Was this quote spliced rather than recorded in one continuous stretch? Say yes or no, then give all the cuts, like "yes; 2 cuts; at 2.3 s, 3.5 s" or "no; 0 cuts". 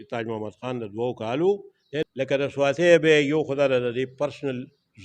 yes; 1 cut; at 2.1 s